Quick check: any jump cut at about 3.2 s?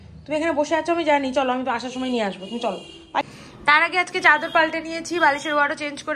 yes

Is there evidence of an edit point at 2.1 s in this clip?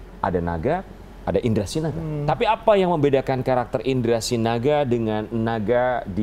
yes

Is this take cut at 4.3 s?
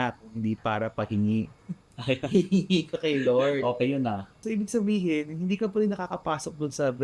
yes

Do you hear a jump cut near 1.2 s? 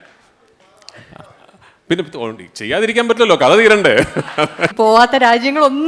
no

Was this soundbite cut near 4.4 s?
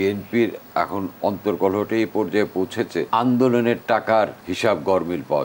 yes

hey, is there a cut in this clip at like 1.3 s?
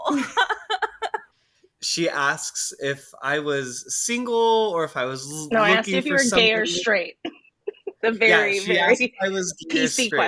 yes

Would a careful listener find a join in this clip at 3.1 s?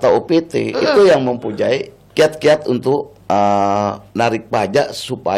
yes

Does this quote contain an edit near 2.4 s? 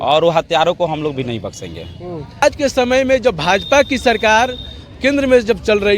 yes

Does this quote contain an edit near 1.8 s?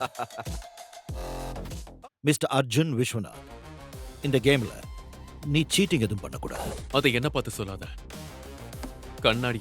yes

